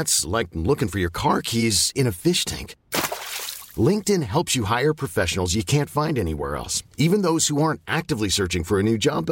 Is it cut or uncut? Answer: uncut